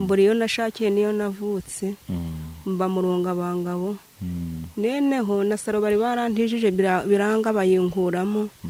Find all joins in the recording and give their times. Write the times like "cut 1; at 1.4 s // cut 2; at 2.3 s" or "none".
none